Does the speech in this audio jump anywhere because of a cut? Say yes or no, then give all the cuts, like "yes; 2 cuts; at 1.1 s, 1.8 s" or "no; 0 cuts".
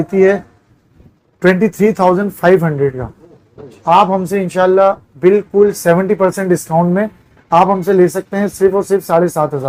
no; 0 cuts